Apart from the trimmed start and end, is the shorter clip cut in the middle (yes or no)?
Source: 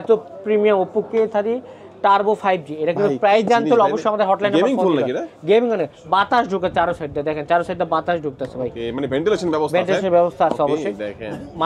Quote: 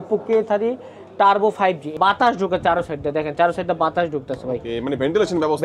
yes